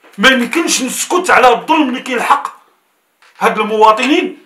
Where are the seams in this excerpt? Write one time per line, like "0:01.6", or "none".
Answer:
none